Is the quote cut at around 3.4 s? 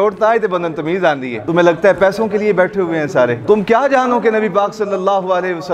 yes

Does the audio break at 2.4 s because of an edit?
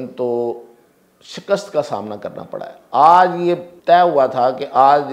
no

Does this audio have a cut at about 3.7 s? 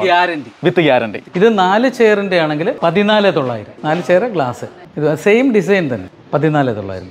yes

